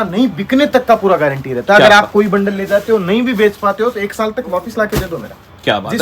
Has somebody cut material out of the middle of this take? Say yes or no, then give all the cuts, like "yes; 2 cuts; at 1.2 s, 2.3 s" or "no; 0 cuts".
no; 0 cuts